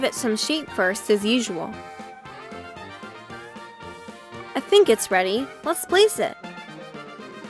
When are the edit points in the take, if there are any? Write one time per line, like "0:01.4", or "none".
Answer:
0:01.7
0:04.5
0:06.4